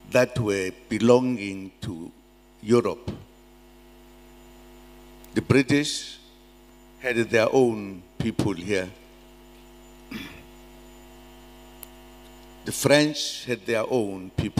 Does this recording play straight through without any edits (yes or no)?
yes